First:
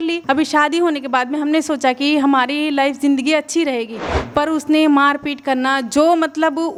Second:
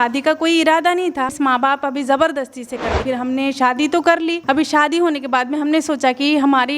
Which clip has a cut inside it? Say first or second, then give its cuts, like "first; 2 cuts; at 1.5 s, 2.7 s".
second; 2 cuts; at 1.3 s, 3.0 s